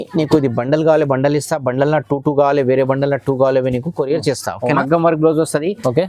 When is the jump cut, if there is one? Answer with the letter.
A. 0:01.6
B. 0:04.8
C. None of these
B